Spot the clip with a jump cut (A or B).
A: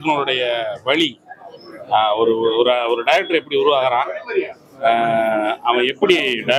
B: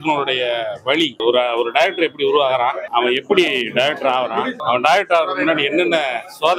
B